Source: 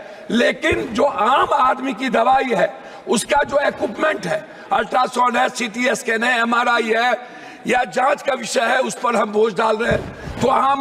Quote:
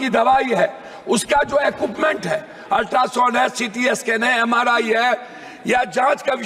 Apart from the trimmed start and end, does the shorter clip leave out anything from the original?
no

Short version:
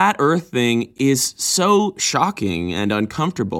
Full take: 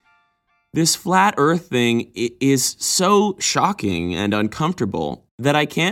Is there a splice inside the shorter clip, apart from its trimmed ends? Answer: yes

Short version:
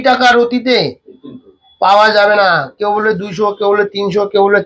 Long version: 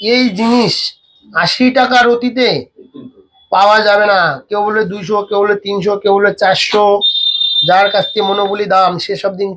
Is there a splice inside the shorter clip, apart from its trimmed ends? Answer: no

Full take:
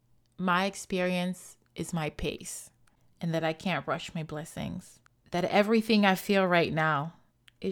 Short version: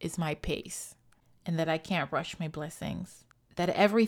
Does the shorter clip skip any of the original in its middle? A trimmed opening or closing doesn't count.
no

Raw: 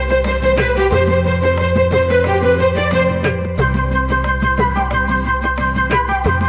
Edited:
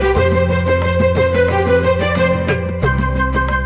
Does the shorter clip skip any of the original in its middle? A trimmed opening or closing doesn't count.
no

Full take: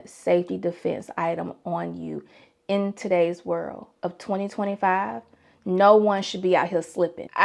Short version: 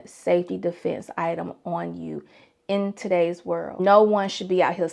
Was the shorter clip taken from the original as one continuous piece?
no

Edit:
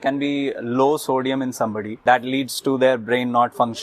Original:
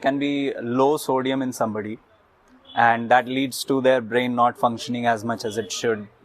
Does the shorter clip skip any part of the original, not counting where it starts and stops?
yes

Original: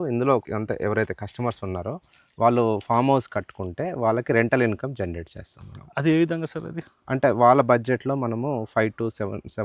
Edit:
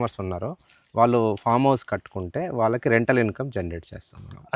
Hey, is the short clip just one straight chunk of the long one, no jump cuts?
yes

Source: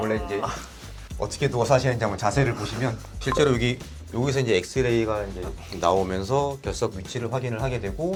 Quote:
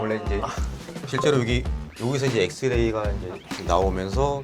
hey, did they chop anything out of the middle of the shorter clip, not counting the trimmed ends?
yes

